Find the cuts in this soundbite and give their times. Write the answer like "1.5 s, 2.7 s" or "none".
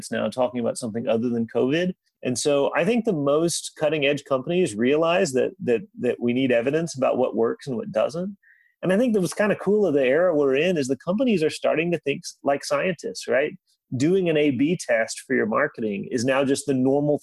2.1 s